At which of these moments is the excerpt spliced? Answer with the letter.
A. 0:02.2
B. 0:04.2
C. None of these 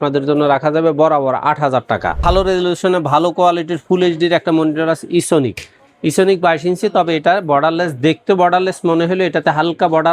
A